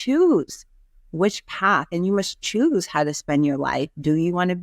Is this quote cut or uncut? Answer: uncut